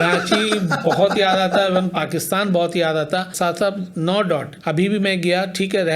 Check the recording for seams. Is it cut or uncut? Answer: cut